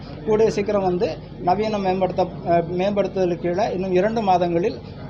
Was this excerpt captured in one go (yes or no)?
yes